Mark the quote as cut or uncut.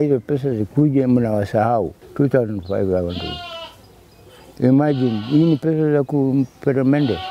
cut